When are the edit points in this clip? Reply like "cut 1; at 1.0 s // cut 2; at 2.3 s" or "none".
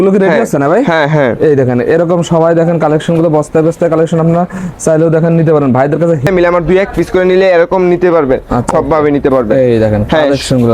cut 1; at 6.3 s // cut 2; at 8.7 s